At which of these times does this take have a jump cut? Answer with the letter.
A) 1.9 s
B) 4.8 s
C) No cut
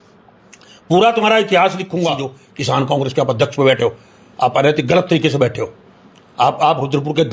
A